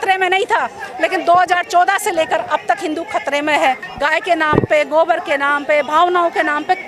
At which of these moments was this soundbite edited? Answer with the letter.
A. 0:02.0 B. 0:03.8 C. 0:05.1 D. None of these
B